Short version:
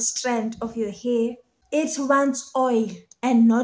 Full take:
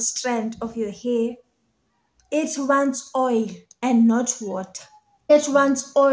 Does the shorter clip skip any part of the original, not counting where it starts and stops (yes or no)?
yes